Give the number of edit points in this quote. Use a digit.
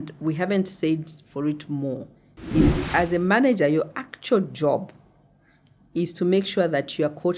1